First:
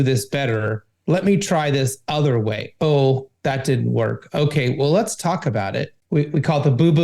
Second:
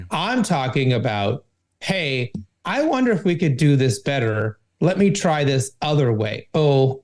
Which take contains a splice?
first; 1 cut; at 6.0 s

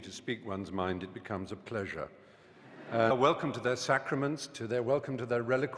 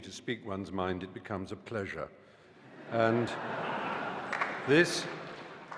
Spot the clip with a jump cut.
second; 1 cut; at 3.1 s

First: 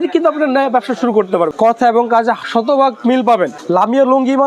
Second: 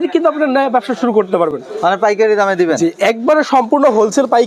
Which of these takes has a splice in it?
first; 2 cuts; at 1.5 s, 3.6 s

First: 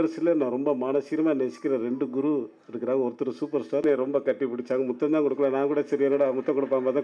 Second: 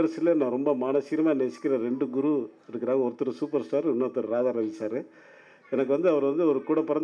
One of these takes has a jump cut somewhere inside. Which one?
first; 1 cut; at 3.8 s

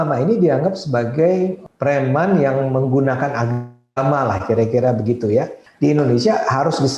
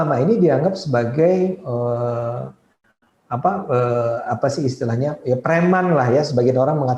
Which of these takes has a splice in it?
first; 2 cuts; at 1.6 s, 5.6 s

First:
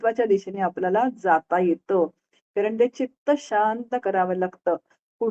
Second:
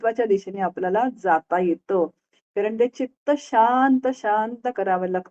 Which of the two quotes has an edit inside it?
first; 1 cut; at 3.5 s

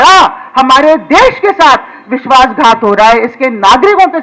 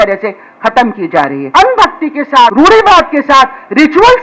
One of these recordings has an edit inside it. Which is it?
second; 2 cuts; at 1.4 s, 2.5 s

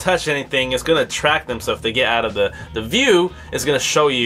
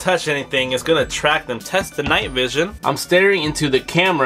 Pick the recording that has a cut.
second; 2 cuts; at 1.6 s, 2.8 s

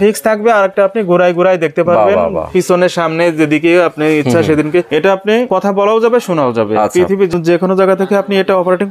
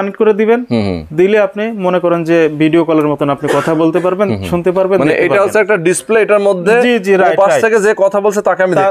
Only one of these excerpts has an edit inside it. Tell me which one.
first; 2 cuts; at 5.0 s, 7.3 s

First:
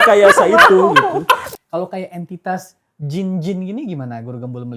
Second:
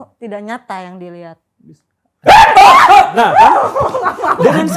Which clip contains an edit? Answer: first; 1 cut; at 1.5 s

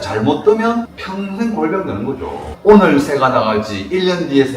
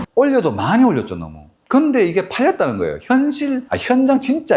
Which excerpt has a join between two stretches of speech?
first; 1 cut; at 2.6 s

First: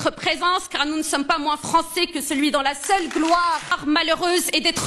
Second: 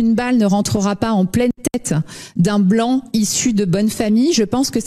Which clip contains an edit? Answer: first; 1 cut; at 3.8 s

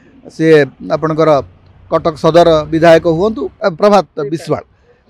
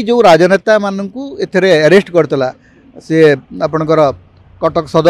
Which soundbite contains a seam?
first; 1 cut; at 3.5 s

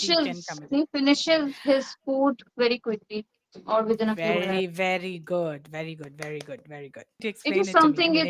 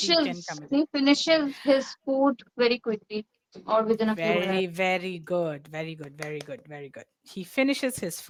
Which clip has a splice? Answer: first; 1 cut; at 7.3 s

